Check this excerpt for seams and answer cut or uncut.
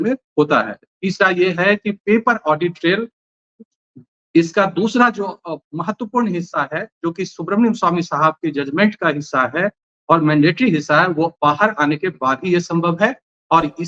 uncut